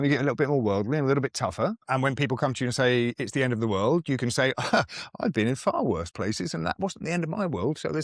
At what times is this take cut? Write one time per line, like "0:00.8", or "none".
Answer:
0:01.8